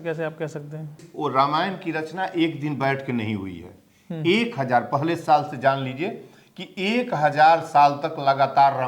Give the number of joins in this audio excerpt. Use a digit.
1